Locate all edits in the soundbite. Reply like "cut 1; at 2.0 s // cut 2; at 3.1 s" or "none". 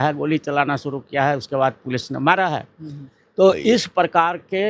none